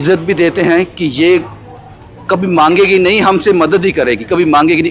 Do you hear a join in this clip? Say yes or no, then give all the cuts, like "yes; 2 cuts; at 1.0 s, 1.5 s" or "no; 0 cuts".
no; 0 cuts